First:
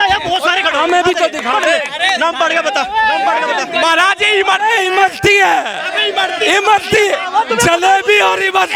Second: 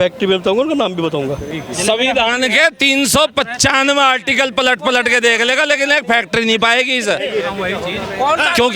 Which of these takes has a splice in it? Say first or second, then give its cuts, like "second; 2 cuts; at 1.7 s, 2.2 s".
second; 1 cut; at 1.6 s